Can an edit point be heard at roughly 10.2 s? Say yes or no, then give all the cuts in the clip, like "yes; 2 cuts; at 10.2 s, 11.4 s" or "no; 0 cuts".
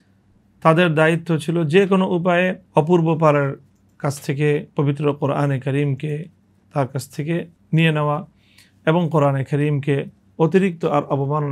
no; 2 cuts; at 2.6 s, 7.6 s